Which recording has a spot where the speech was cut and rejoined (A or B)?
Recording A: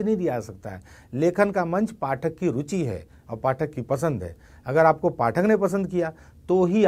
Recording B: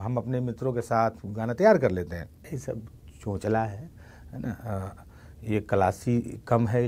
B